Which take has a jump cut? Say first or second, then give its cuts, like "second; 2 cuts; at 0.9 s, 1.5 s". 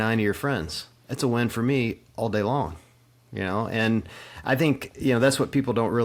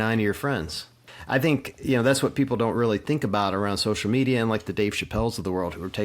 second; 1 cut; at 1.0 s